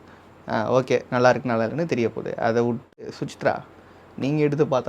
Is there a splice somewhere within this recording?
yes; 1 cut; at 2.9 s

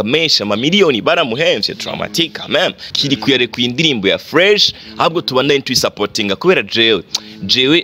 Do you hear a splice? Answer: yes; 1 cut; at 2.9 s

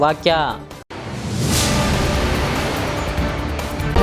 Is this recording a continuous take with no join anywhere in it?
yes; 0 cuts

